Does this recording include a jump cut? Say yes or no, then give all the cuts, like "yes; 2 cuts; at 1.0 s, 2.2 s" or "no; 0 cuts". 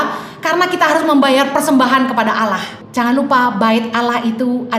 yes; 1 cut; at 2.8 s